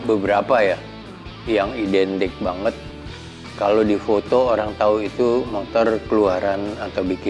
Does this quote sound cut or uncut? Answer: uncut